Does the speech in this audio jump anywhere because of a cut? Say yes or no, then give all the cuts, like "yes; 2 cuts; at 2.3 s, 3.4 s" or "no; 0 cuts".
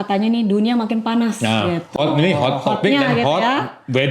no; 0 cuts